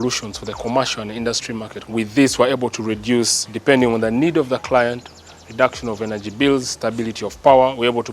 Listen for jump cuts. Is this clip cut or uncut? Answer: uncut